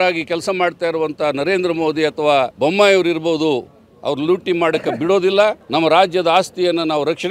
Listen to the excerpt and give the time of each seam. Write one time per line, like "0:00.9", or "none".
0:02.5
0:05.6